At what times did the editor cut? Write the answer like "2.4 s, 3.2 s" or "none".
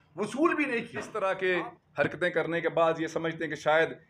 1.0 s